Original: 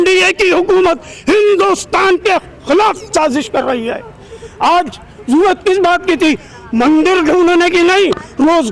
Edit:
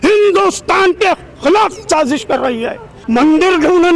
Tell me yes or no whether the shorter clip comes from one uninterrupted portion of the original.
no